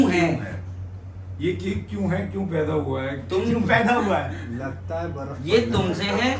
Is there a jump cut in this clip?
no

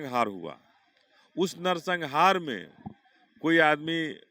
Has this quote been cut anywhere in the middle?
no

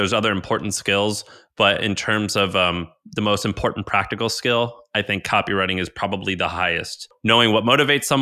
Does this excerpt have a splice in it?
yes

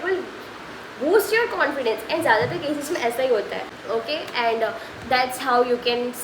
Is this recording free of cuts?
no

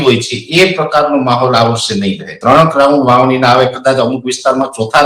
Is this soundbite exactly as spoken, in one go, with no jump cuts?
no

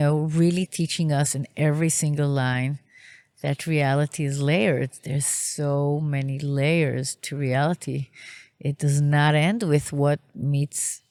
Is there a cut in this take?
no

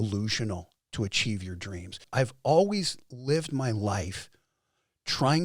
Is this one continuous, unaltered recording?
no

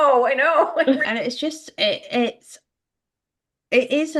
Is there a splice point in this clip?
yes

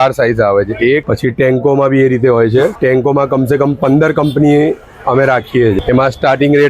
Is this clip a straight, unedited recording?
no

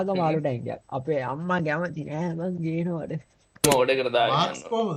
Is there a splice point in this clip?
yes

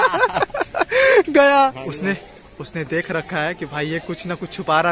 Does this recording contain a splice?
yes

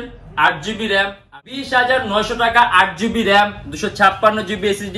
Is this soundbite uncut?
no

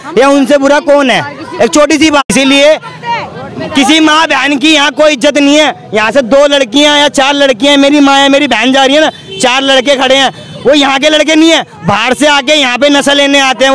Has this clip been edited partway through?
yes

